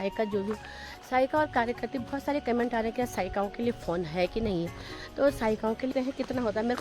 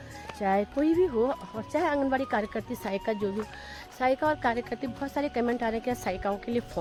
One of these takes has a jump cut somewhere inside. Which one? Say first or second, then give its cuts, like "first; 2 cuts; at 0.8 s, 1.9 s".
first; 1 cut; at 5.9 s